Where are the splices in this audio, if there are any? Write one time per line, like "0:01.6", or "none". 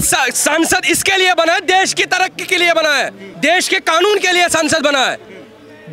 0:03.2